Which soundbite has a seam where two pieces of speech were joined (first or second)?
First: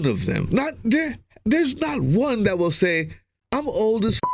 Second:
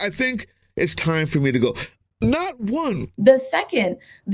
second